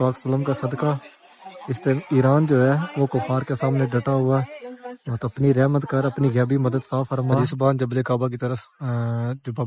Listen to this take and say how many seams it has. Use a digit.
1